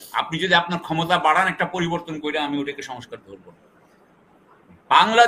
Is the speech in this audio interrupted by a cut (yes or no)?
no